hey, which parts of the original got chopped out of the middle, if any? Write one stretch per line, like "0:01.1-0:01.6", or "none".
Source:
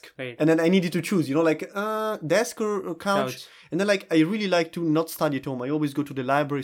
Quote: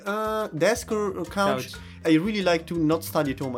0:03.7-0:04.0